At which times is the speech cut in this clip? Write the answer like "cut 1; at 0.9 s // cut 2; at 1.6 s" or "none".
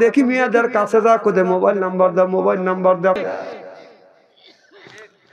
cut 1; at 3.2 s